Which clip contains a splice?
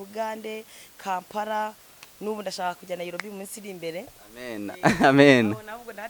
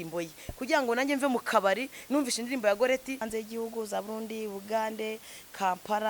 second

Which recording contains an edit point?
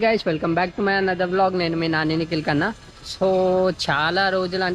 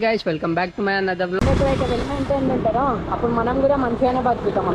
second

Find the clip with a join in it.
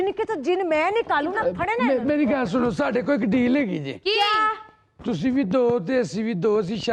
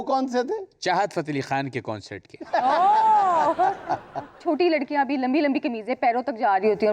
second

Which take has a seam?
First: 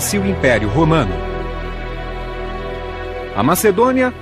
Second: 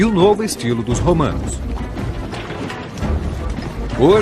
second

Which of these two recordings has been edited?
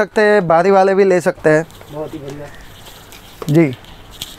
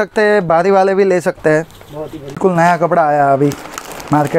second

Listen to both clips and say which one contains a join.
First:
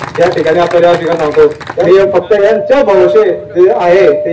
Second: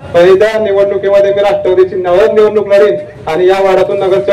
first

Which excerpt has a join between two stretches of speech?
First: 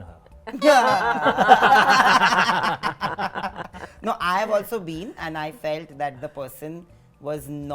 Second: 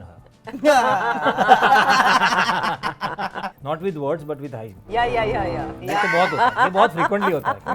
second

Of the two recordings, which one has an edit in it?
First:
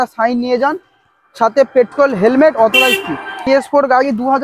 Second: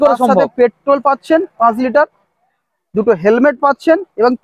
first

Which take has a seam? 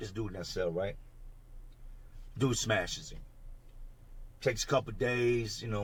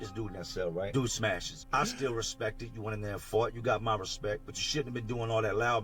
second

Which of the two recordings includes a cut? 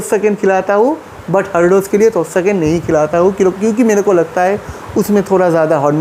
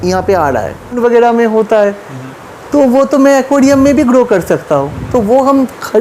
second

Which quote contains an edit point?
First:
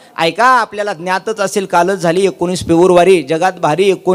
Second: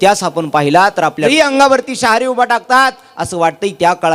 second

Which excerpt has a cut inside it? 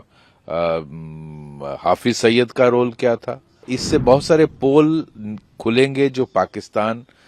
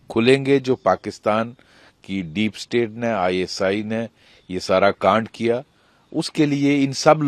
first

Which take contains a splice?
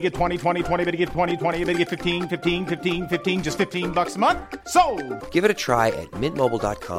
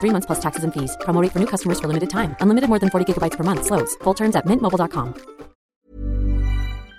second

